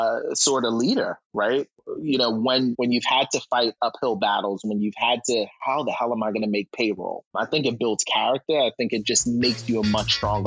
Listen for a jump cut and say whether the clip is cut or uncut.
cut